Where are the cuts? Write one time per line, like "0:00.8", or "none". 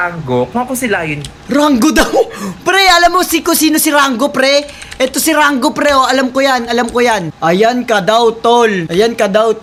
none